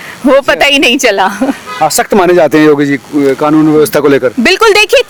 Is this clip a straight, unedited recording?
yes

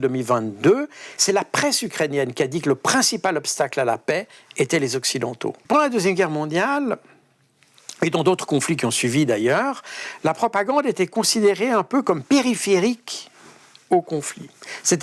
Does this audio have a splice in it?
yes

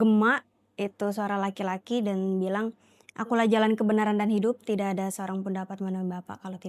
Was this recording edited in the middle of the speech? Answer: no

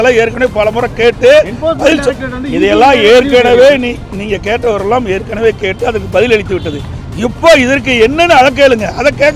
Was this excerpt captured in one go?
yes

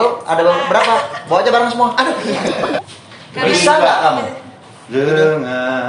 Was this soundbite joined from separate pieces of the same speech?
yes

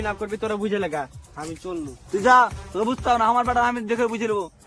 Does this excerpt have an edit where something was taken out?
no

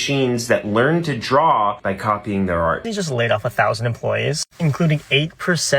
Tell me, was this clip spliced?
yes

